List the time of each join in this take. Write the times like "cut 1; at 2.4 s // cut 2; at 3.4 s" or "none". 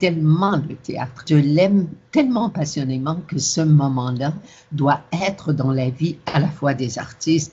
cut 1; at 1.2 s